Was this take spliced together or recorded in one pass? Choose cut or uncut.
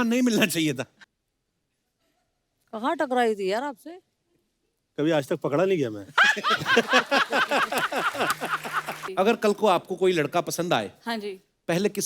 cut